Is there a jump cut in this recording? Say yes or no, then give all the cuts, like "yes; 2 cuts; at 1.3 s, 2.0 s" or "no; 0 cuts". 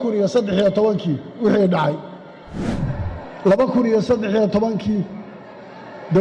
yes; 1 cut; at 2.7 s